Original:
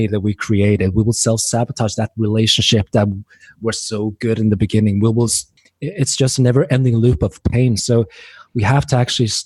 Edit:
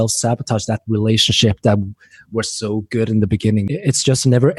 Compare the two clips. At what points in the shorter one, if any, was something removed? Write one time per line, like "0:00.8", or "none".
0:03.7